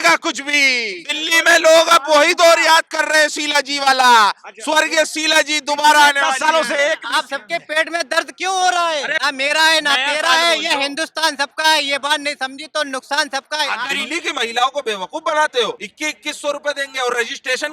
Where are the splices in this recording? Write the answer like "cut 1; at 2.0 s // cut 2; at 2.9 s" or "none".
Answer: cut 1; at 1.1 s // cut 2; at 7.0 s // cut 3; at 9.1 s // cut 4; at 13.8 s // cut 5; at 15.9 s

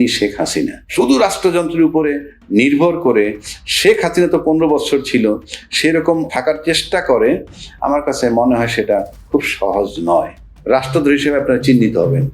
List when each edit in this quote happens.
cut 1; at 0.9 s // cut 2; at 6.3 s // cut 3; at 10.4 s

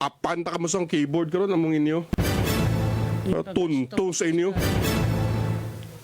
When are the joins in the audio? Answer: cut 1; at 2.1 s

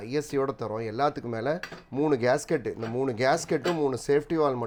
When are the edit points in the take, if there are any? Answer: none

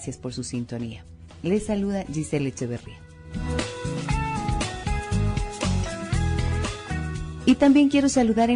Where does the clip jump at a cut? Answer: cut 1; at 6.2 s

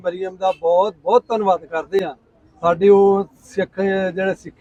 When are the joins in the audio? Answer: none

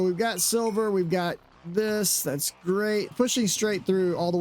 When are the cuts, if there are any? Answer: cut 1; at 3.1 s

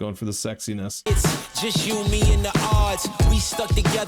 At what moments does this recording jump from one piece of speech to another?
cut 1; at 0.9 s

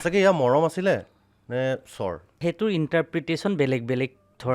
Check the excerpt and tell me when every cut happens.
cut 1; at 2.4 s

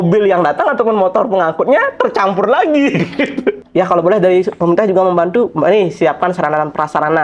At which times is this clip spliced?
cut 1; at 3.6 s

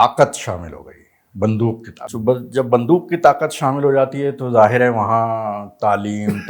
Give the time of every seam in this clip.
cut 1; at 2.0 s

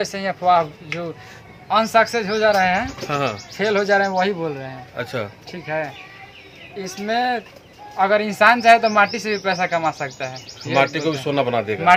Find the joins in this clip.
none

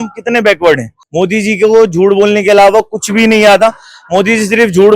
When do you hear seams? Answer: cut 1; at 1.0 s

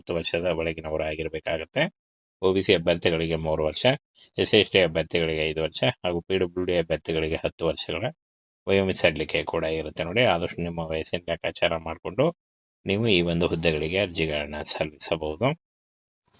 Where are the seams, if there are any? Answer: none

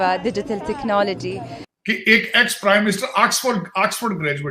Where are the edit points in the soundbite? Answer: cut 1; at 1.6 s

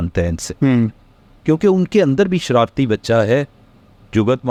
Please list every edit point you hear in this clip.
none

